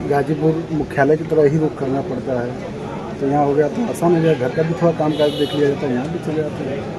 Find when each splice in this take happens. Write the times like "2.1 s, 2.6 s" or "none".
none